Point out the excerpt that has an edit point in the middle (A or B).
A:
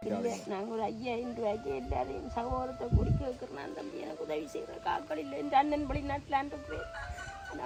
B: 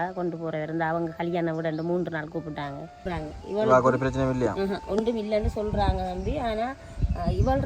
B